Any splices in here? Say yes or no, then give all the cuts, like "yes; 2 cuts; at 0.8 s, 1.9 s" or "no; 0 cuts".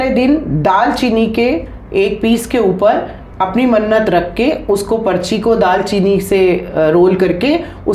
no; 0 cuts